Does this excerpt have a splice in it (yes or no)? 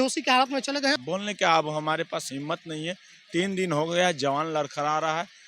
yes